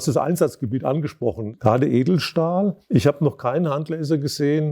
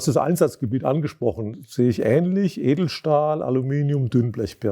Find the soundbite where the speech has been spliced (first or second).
first